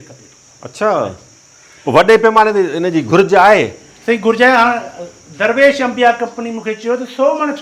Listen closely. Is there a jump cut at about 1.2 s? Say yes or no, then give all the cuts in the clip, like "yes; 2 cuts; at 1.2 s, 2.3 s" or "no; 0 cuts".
no; 0 cuts